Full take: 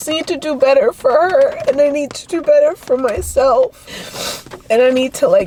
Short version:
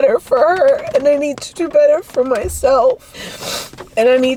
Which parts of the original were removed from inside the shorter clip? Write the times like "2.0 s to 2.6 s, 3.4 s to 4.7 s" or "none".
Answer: none